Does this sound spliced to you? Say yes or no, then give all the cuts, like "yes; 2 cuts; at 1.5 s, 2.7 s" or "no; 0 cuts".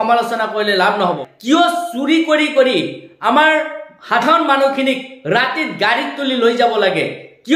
yes; 1 cut; at 1.3 s